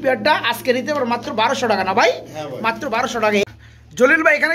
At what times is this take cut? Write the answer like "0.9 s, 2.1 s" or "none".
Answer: none